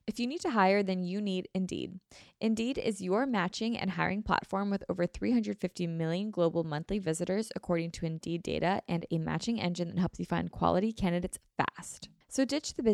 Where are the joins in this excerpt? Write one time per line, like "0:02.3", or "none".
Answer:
none